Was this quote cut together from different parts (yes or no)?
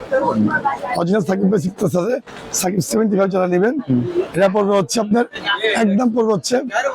no